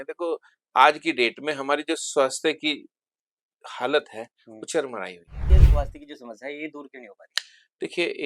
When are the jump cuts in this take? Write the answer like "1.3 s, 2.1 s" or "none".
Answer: 5.5 s